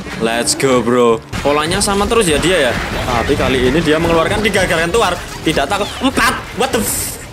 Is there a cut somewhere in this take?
yes; 2 cuts; at 1.3 s, 2.9 s

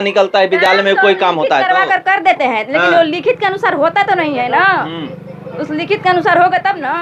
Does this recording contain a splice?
no; 0 cuts

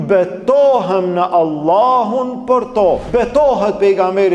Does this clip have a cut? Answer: yes; 1 cut; at 3.0 s

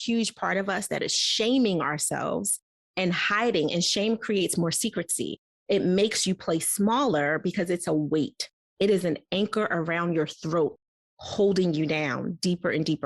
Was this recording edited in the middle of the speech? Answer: no; 0 cuts

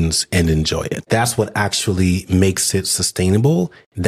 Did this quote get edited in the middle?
yes; 1 cut; at 1.0 s

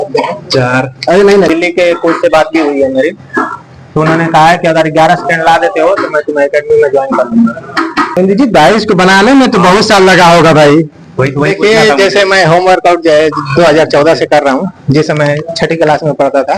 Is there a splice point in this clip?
yes; 2 cuts; at 1.5 s, 8.2 s

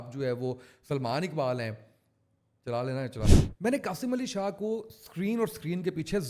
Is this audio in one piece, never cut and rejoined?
no; 1 cut; at 3.4 s

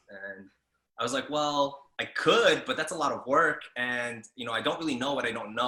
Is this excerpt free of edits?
yes; 0 cuts

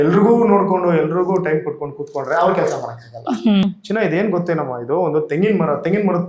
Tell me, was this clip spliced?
yes; 1 cut; at 3.6 s

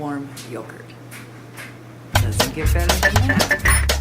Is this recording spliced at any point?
yes; 1 cut; at 2.0 s

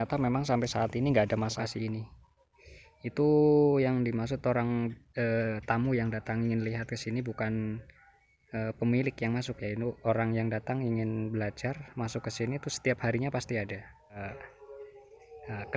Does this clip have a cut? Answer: yes; 2 cuts; at 1.5 s, 14.2 s

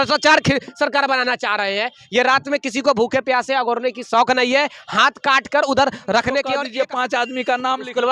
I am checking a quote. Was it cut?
yes; 1 cut; at 6.6 s

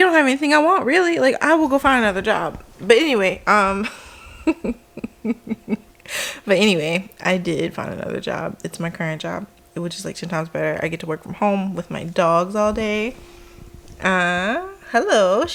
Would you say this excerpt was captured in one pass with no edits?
yes; 0 cuts

